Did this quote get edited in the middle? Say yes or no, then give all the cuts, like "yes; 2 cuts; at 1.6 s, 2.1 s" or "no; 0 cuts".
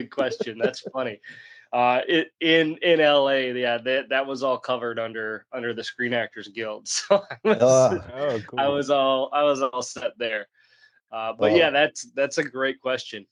no; 0 cuts